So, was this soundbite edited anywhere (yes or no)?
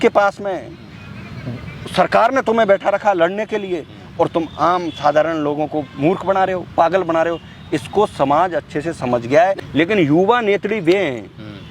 yes